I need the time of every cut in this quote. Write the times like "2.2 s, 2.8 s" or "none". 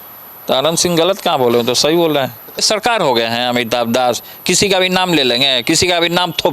2.6 s